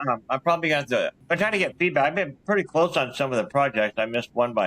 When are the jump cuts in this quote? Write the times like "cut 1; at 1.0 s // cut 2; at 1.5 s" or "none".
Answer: cut 1; at 1.2 s